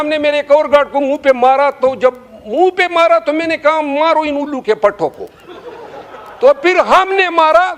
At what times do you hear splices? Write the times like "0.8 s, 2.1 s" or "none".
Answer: none